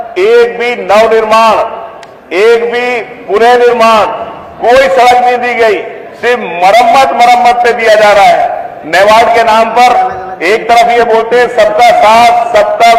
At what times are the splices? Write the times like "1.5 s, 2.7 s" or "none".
none